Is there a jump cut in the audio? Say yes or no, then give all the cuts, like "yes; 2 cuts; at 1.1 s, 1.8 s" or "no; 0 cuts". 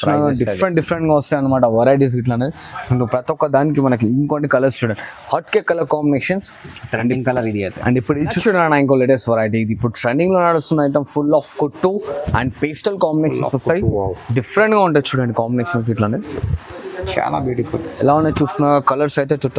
yes; 1 cut; at 8.4 s